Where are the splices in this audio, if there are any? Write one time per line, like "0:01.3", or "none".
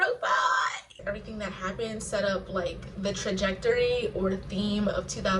0:00.9

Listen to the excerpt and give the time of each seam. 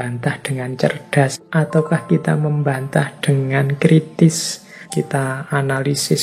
0:01.4
0:04.9

